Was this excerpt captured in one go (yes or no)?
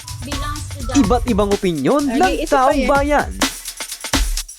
no